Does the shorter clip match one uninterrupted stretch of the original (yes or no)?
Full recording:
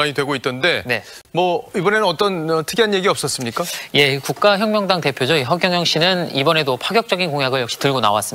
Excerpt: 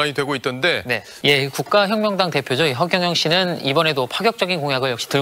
no